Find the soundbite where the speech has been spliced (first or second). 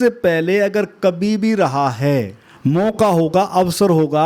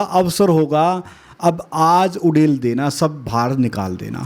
first